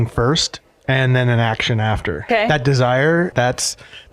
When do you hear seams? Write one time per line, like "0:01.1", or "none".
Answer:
0:02.3
0:03.3

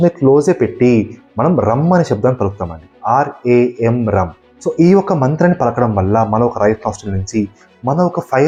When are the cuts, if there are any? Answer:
none

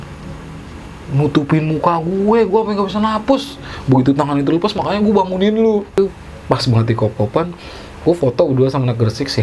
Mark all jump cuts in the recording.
0:05.9

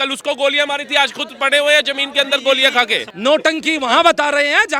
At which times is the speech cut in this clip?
0:03.0

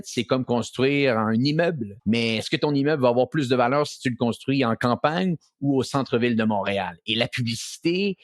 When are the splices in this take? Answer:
0:01.9

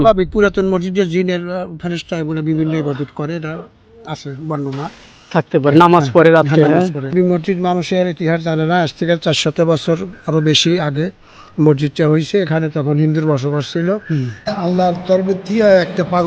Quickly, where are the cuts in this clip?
0:07.1
0:14.5

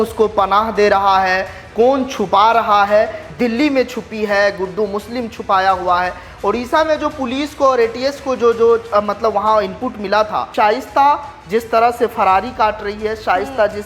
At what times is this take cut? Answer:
0:03.2
0:10.5

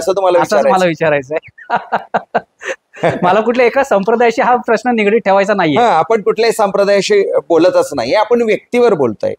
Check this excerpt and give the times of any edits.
none

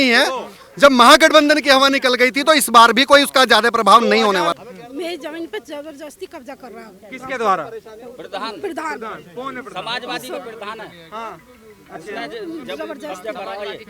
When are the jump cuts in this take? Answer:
0:04.6

